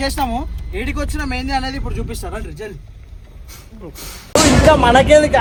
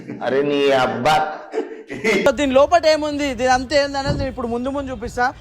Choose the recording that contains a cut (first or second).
second